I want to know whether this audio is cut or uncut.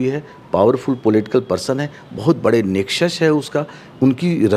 uncut